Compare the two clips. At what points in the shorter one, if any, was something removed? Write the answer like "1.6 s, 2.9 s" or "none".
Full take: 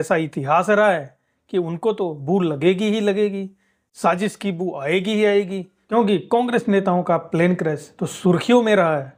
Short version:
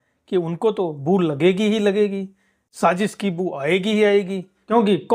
none